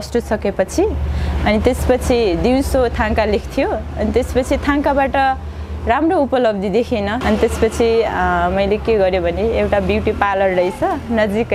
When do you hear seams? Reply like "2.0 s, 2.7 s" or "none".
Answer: none